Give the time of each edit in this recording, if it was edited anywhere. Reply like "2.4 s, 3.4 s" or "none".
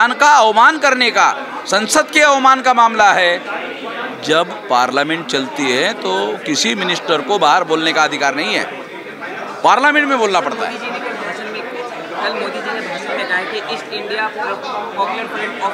none